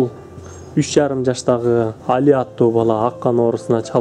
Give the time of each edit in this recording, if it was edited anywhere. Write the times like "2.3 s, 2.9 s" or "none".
2.0 s

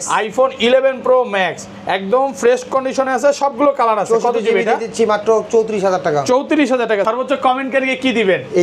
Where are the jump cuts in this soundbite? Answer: 7.1 s

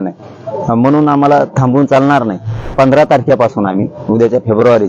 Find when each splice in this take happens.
2.7 s

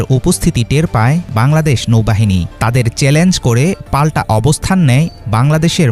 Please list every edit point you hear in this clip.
none

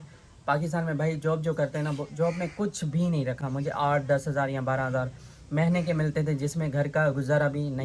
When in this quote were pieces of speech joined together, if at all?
none

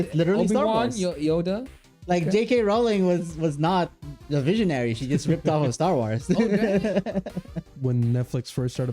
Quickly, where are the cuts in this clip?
7.7 s

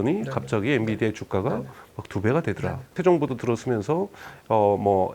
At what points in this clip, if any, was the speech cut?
3.0 s

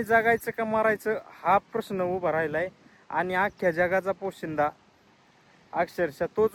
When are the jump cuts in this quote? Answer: none

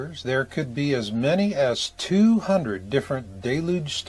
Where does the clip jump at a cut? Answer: none

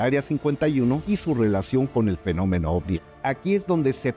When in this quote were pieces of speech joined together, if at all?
1.0 s, 2.9 s

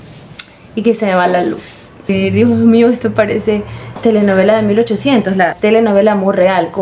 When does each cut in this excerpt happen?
2.1 s, 3.8 s, 5.5 s

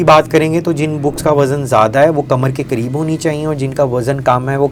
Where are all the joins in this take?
none

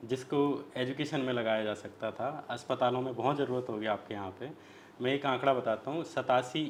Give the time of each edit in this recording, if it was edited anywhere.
none

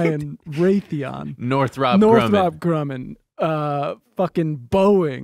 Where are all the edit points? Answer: none

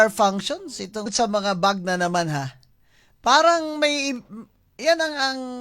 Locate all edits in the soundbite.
1.1 s

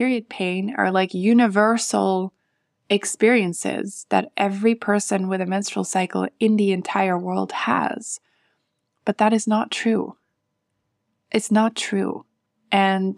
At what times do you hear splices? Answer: none

